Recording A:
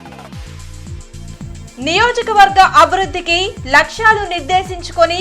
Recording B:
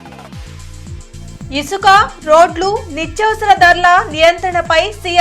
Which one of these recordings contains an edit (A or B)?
A